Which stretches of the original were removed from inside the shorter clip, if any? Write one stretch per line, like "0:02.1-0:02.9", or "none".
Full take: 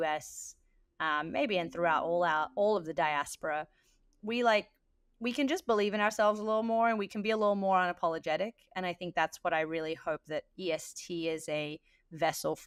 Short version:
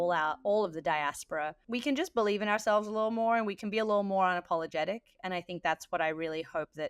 0:03.7-0:05.1